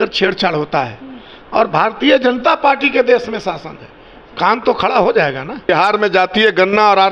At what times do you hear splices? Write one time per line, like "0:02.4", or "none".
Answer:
0:05.7